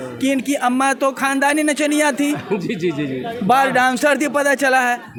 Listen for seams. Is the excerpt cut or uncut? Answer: uncut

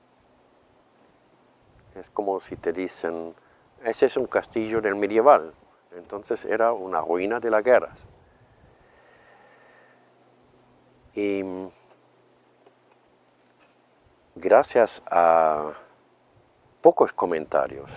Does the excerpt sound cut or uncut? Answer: cut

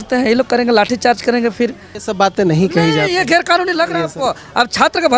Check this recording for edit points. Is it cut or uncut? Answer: cut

